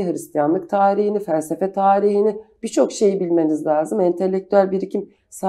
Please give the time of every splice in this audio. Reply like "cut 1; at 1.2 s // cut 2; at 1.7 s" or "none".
none